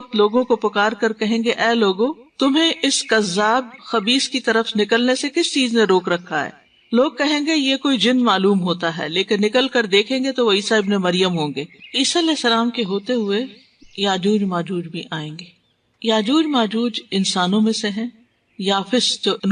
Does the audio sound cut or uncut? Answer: cut